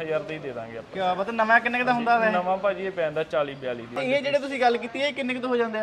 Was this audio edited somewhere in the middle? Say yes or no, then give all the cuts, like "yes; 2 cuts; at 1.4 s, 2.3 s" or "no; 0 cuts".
yes; 1 cut; at 3.9 s